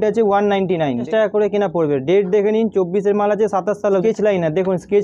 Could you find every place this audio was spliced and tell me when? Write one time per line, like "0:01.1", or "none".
0:01.1
0:04.0